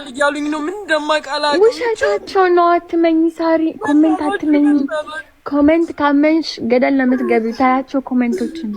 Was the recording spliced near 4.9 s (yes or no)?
no